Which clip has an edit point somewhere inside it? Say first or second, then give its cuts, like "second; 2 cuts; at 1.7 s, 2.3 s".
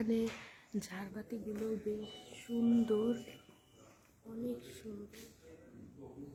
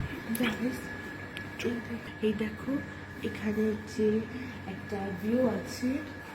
second; 1 cut; at 2.1 s